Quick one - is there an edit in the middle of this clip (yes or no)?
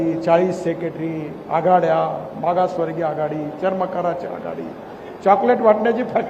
no